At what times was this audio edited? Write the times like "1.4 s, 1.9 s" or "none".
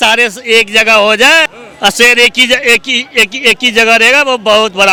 none

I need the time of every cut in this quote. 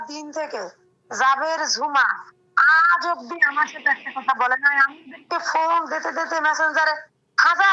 none

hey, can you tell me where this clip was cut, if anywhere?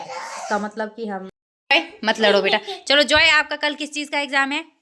1.1 s

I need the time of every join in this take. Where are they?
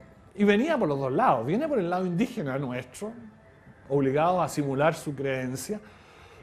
4.5 s

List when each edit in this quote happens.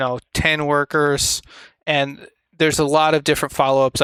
none

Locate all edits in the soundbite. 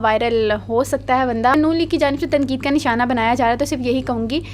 1.5 s

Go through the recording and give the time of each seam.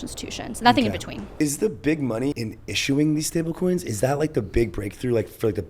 1.2 s, 2.4 s

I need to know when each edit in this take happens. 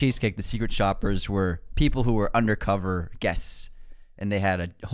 none

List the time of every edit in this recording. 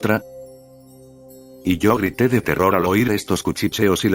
0.9 s, 2.5 s

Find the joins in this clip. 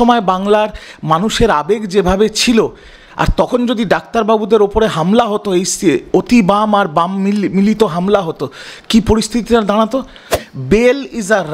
10.3 s

